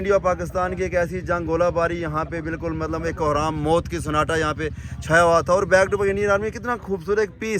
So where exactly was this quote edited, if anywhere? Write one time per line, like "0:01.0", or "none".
none